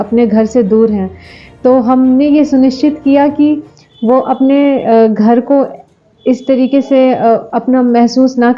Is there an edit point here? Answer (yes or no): no